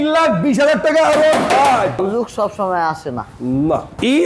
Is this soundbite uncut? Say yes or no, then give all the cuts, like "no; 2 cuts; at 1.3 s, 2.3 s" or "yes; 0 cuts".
yes; 0 cuts